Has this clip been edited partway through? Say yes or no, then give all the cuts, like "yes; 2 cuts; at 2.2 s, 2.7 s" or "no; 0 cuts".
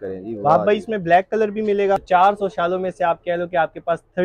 yes; 1 cut; at 2.0 s